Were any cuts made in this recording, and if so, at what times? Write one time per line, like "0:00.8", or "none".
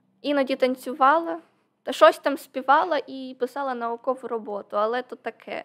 none